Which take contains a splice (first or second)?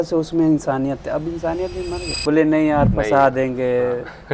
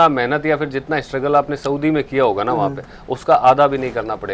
first